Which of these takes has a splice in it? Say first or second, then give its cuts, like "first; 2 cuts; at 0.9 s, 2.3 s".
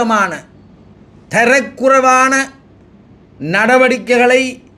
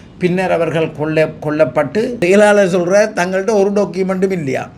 second; 1 cut; at 2.1 s